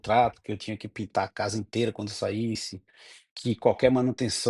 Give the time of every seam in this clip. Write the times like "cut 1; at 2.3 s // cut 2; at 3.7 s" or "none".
none